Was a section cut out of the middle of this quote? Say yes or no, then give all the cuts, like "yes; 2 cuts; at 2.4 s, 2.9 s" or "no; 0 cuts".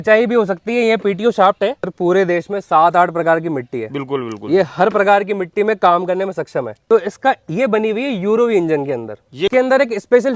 yes; 3 cuts; at 1.9 s, 6.7 s, 9.5 s